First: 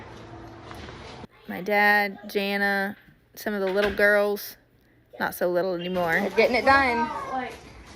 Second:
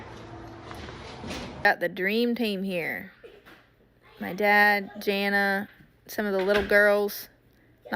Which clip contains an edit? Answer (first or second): first